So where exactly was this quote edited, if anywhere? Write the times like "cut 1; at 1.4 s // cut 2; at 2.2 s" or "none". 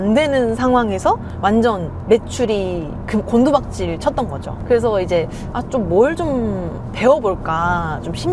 cut 1; at 1.3 s // cut 2; at 4.5 s